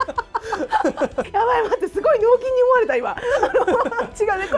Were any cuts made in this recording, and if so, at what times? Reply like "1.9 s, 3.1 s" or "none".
1.3 s